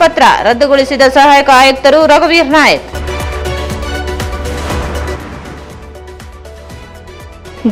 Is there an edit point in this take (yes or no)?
no